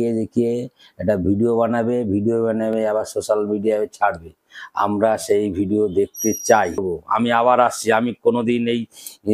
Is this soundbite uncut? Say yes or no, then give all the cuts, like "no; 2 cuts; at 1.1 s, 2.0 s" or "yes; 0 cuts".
no; 1 cut; at 6.8 s